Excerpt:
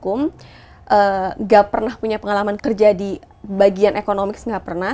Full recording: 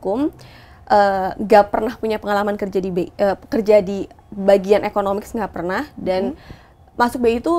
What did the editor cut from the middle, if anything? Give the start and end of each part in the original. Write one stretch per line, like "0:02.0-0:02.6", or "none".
0:02.6-0:03.4